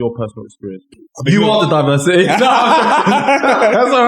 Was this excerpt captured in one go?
no; 1 cut; at 1.0 s

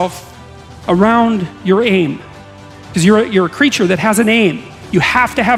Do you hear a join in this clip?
no; 0 cuts

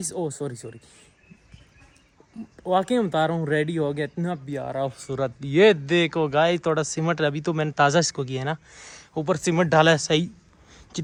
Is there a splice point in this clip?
no; 0 cuts

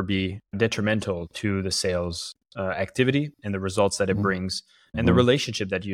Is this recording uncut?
yes; 0 cuts

